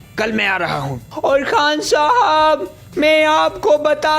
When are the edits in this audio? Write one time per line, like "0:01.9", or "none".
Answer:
0:01.0